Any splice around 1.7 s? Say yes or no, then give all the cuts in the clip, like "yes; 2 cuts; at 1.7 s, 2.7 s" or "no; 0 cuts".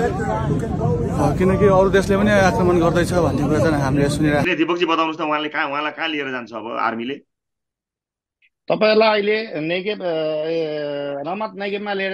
no; 1 cut; at 4.5 s